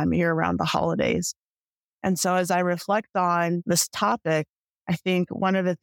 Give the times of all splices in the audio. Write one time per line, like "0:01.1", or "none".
0:03.6